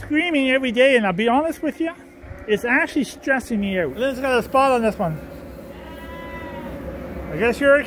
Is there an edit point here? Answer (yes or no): yes